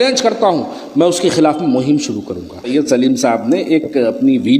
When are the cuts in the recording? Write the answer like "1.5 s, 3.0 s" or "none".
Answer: 2.7 s

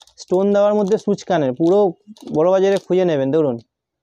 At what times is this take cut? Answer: none

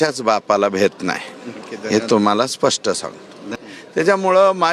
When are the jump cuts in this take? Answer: 3.4 s

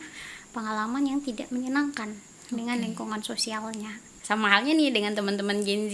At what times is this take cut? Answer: 4.1 s

